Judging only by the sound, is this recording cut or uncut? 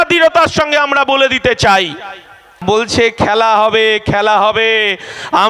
cut